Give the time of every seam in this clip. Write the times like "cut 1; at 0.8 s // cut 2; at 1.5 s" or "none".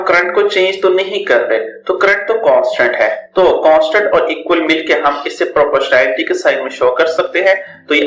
cut 1; at 3.2 s